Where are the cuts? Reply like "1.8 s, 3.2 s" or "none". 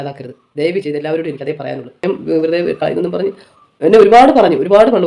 2.0 s